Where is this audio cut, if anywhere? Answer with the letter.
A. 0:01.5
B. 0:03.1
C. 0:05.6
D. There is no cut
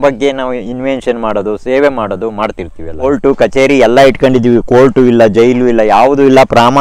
B